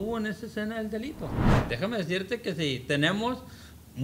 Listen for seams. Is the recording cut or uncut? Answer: cut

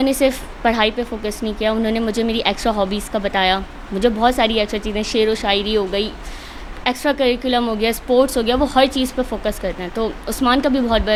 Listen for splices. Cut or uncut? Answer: uncut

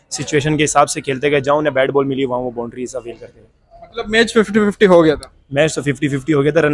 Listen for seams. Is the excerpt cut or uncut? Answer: uncut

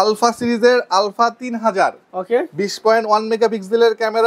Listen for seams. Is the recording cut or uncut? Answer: uncut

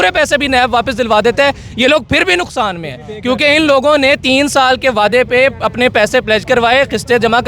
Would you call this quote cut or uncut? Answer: uncut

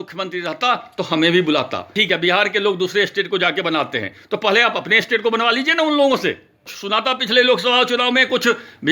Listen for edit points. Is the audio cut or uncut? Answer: cut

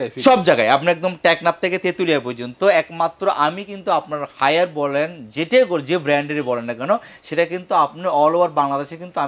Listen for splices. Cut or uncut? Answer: uncut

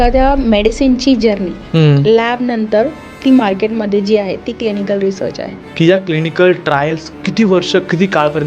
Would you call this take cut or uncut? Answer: cut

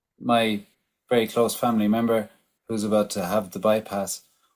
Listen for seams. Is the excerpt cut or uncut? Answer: uncut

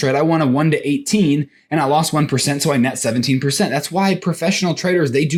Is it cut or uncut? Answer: uncut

